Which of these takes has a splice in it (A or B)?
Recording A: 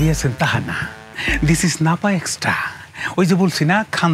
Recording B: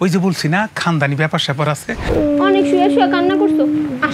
B